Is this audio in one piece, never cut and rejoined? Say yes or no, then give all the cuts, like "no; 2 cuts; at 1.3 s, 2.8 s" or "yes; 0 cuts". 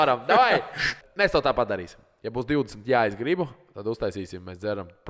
no; 1 cut; at 1.0 s